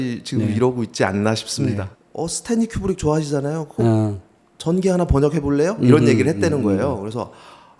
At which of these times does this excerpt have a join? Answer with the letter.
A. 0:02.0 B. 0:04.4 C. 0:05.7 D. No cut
A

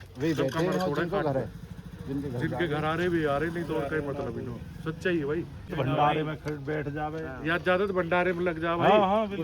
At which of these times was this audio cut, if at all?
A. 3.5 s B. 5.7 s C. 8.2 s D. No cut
B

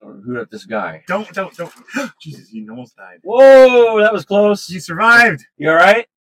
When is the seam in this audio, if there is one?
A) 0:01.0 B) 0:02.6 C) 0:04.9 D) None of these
A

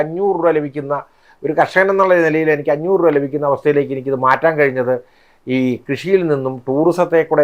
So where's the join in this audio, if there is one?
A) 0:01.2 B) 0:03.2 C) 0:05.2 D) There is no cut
D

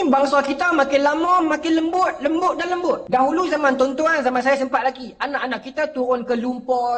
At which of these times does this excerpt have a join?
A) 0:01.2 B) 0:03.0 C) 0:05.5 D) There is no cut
B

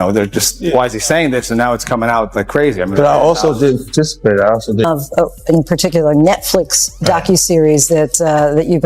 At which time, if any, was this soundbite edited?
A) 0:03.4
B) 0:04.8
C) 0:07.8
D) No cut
B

